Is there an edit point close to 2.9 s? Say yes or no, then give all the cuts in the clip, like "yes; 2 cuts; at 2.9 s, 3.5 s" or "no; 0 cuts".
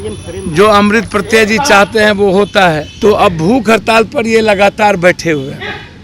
yes; 1 cut; at 2.9 s